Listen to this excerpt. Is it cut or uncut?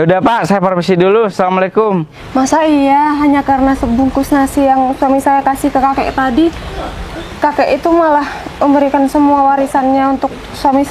cut